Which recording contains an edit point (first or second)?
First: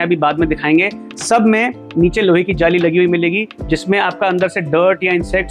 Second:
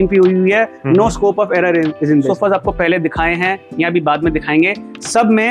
second